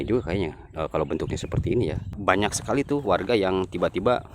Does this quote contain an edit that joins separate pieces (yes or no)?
yes